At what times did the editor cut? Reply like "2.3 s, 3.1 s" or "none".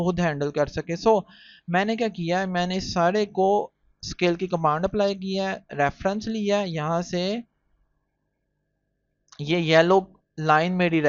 none